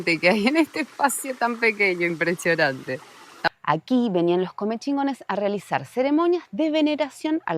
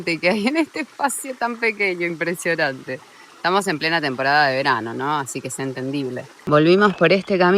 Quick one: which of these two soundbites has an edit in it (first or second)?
first